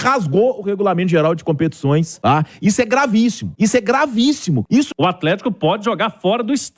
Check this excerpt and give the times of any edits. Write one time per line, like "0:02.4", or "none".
0:02.1
0:03.4
0:04.8